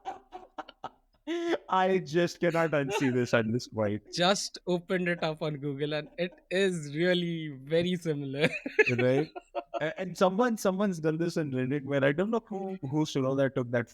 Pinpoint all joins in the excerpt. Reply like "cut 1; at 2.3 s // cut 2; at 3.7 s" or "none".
cut 1; at 4.1 s